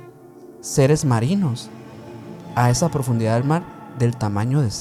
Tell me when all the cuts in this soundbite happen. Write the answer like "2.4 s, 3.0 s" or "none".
none